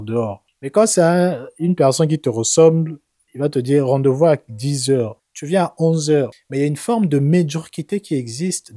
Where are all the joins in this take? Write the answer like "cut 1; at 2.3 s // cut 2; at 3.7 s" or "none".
cut 1; at 6.4 s